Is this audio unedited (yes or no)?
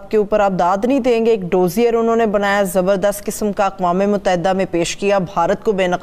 yes